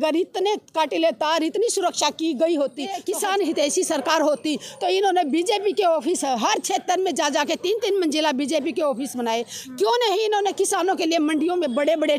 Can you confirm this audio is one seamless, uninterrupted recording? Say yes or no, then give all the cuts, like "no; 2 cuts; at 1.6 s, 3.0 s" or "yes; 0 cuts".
no; 1 cut; at 3.0 s